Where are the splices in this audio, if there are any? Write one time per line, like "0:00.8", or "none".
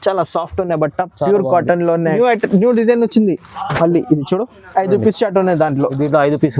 0:02.1